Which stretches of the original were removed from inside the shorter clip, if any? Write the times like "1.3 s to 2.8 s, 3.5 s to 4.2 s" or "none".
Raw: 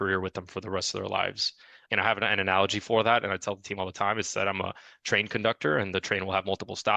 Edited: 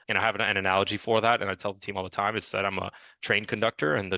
none